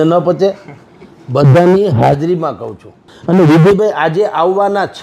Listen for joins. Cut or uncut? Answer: cut